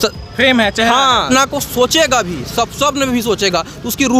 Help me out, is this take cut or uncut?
cut